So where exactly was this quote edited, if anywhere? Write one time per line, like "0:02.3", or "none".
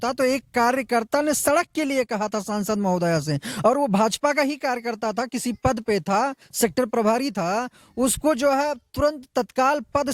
none